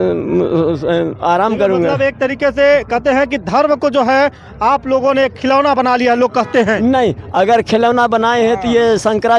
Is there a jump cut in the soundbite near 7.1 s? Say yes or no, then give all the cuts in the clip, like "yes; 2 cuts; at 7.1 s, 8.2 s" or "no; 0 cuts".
no; 0 cuts